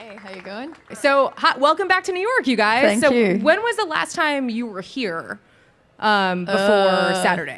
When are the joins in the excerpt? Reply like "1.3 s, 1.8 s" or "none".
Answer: 2.7 s

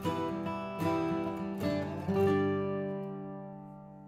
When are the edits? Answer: none

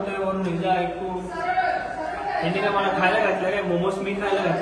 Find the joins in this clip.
none

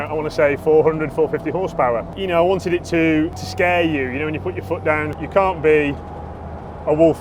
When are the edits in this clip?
2.1 s, 3.4 s, 5.2 s

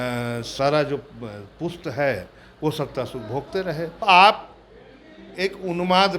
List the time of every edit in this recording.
4.0 s

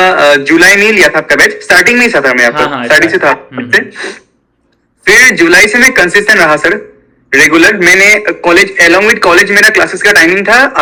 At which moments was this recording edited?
none

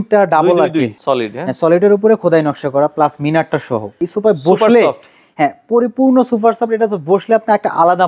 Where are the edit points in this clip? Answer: 0.9 s, 4.0 s

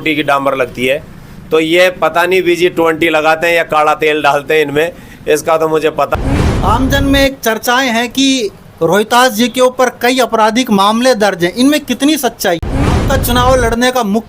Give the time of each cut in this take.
6.1 s, 12.8 s

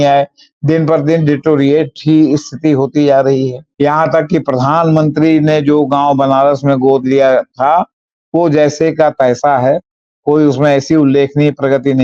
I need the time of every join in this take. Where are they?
3.6 s

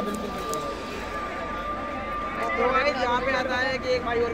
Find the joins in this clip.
none

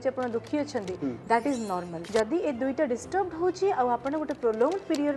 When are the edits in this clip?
2.0 s

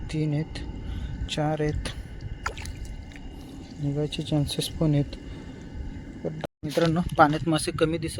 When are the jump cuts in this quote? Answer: 6.4 s

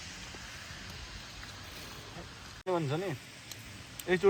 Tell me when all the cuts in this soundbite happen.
2.6 s

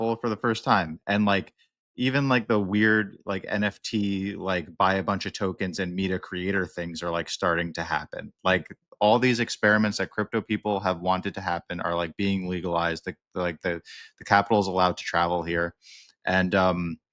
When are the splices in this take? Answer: none

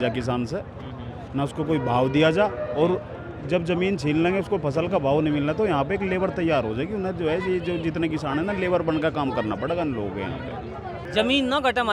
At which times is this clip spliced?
11.0 s

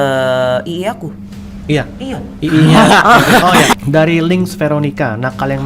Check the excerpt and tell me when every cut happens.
1.5 s, 3.7 s

